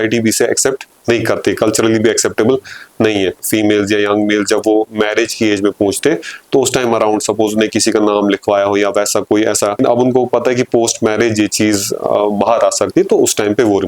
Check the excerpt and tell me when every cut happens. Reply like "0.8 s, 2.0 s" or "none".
3.4 s, 9.8 s